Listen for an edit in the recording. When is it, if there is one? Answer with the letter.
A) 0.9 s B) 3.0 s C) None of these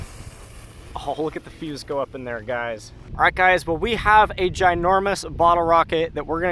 B